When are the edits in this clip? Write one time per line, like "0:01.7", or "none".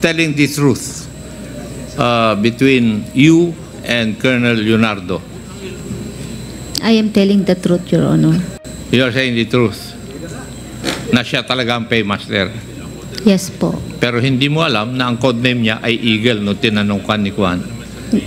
none